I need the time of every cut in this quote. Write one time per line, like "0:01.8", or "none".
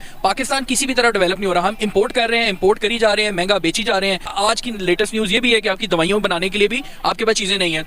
0:04.3